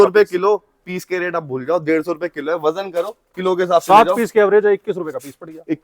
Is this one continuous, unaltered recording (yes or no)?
yes